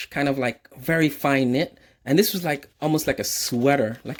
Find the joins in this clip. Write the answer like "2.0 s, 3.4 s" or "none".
none